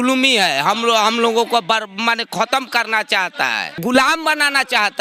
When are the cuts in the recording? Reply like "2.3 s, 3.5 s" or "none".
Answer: 3.7 s